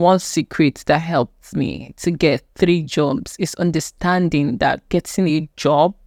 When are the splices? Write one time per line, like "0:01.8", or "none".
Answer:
none